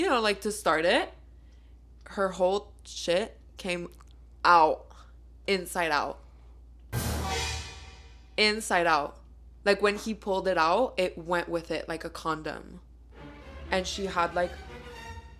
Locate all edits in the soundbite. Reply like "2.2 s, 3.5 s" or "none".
none